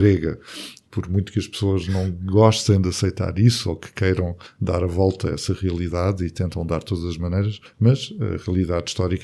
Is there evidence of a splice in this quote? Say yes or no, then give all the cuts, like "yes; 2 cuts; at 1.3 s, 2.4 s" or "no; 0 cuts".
no; 0 cuts